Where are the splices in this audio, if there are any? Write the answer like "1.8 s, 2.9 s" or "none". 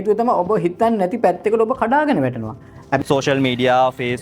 3.0 s